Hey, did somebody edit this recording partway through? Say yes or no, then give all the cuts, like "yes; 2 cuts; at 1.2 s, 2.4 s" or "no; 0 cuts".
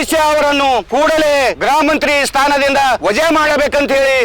yes; 3 cuts; at 0.9 s, 1.6 s, 3.0 s